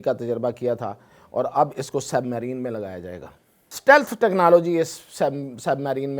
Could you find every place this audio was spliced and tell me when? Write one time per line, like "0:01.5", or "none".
0:03.7